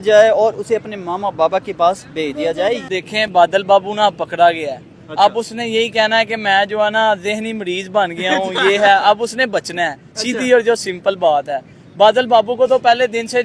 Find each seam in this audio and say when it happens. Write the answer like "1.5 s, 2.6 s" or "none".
2.9 s